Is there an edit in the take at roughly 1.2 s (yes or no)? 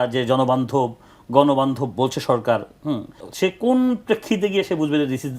no